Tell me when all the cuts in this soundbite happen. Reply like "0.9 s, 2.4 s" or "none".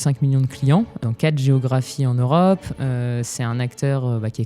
1.0 s